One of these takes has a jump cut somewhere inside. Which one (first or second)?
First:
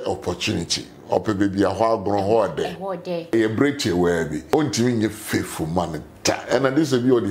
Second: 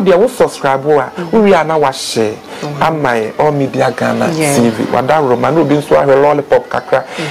first